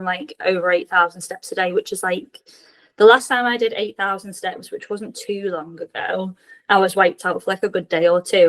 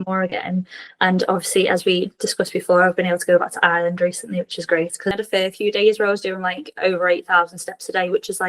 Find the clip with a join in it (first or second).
second